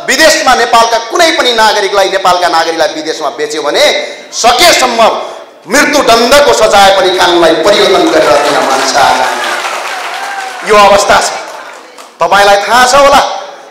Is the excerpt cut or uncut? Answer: uncut